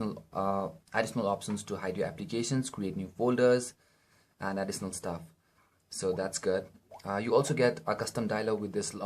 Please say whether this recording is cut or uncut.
cut